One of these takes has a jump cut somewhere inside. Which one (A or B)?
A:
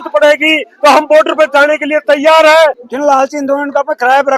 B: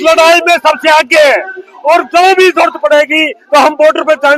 A